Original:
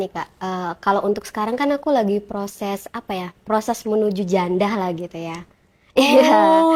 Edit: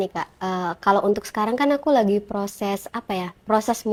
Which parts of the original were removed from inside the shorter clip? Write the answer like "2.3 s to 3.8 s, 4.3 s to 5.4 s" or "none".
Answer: none